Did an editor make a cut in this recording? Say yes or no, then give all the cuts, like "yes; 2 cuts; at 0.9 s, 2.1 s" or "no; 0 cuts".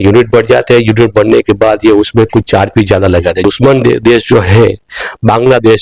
yes; 1 cut; at 3.4 s